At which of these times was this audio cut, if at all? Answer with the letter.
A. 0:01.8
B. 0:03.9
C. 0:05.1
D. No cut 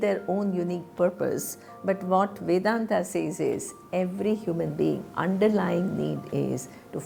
D